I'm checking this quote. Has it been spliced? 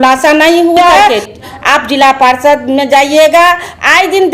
yes; 1 cut; at 1.1 s

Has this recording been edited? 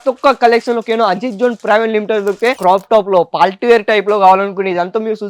yes; 1 cut; at 2.6 s

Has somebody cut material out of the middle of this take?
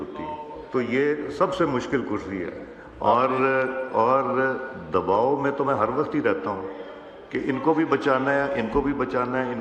no; 0 cuts

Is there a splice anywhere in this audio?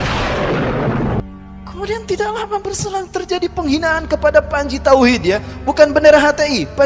yes; 1 cut; at 1.2 s

